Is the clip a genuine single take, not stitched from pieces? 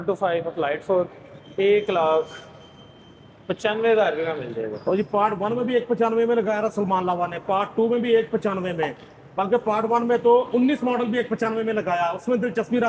yes; 0 cuts

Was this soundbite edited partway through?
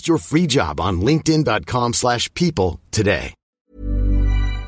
yes; 1 cut; at 3.5 s

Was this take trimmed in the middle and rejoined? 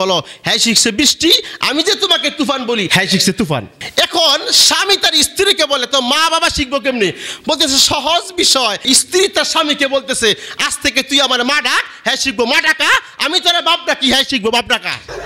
no; 0 cuts

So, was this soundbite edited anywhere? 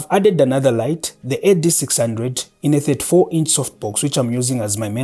no; 0 cuts

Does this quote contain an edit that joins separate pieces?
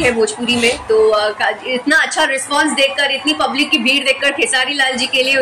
no; 0 cuts

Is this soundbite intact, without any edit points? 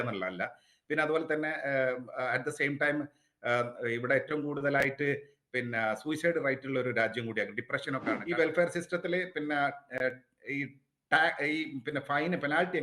no; 1 cut; at 8.1 s

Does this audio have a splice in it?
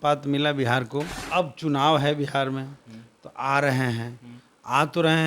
yes; 1 cut; at 1.2 s

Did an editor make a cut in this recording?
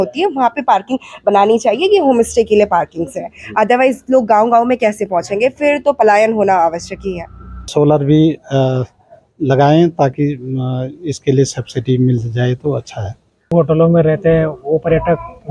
yes; 2 cuts; at 7.7 s, 13.5 s

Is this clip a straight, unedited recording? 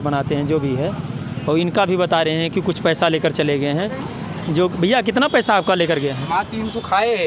yes; 0 cuts

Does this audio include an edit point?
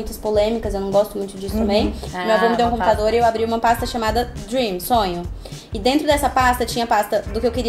yes; 1 cut; at 2.1 s

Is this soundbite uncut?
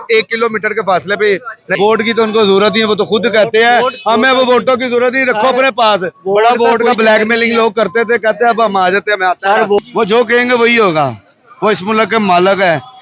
no; 2 cuts; at 1.7 s, 9.8 s

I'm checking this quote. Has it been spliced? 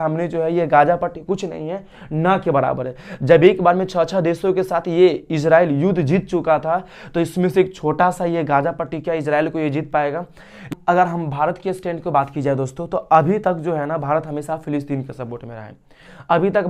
yes; 1 cut; at 10.7 s

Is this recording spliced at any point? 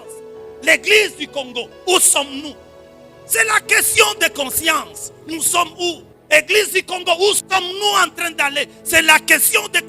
yes; 1 cut; at 6.1 s

